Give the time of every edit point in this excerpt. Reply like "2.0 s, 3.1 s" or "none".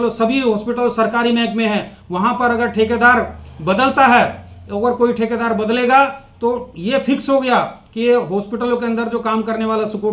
none